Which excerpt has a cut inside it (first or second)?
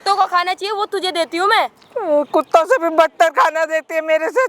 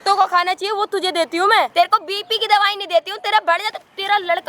second